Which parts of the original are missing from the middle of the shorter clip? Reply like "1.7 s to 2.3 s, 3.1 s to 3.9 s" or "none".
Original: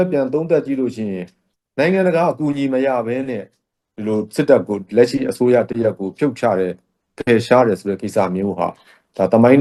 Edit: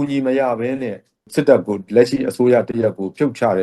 3.7 s to 4.3 s